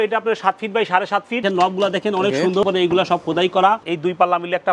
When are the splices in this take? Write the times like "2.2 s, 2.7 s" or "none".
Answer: 1.4 s, 2.6 s, 3.8 s